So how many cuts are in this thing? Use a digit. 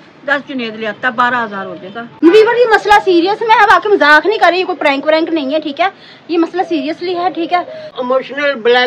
2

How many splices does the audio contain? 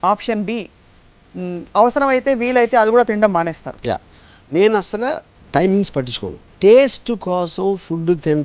1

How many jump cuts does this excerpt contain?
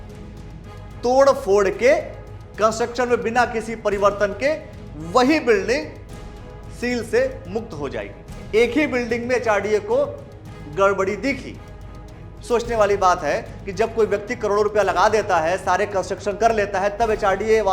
1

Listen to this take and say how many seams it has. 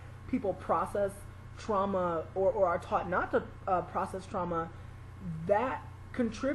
1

